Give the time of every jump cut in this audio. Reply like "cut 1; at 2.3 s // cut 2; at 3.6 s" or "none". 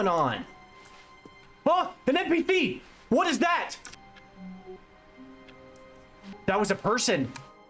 cut 1; at 4.8 s